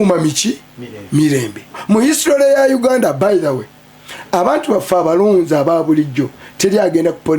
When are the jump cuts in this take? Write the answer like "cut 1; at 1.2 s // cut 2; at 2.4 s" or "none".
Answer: cut 1; at 1.8 s